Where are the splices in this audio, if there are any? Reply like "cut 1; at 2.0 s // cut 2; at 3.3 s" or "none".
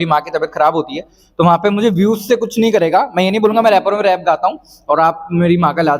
none